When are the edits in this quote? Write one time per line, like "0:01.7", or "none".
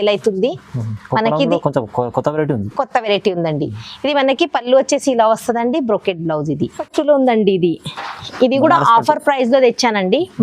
0:06.8